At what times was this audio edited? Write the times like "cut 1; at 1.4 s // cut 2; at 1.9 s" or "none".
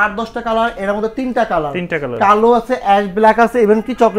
none